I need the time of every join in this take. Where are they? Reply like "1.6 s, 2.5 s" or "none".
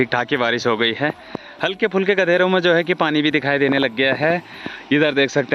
none